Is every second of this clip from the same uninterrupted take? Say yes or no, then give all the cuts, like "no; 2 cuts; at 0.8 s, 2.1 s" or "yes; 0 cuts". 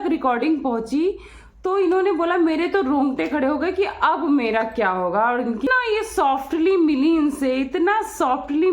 no; 1 cut; at 5.7 s